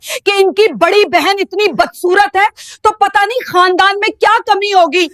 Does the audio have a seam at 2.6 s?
no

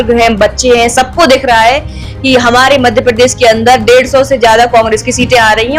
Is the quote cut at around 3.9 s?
no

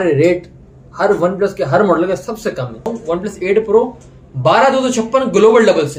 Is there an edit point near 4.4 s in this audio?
no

